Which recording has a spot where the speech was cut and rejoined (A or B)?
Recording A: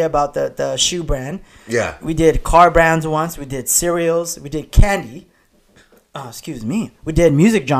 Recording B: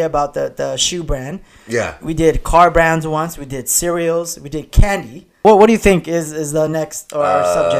B